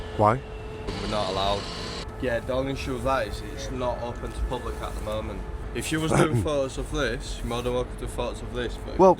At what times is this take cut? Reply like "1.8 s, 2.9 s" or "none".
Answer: 0.9 s, 2.1 s, 5.6 s